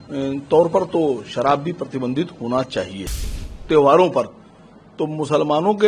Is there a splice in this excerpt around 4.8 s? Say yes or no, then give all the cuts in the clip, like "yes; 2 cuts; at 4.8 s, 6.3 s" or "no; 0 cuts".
no; 1 cut; at 3.2 s